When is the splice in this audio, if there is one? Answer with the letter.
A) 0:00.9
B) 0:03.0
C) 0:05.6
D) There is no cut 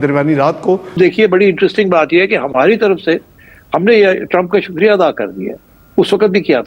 A